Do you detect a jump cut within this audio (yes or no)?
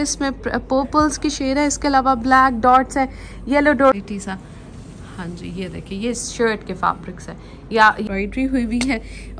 yes